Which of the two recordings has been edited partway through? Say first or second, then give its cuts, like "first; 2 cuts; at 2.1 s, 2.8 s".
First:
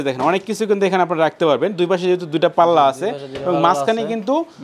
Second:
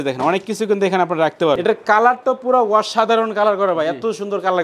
second; 1 cut; at 1.6 s